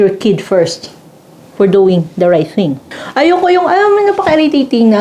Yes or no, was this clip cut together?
yes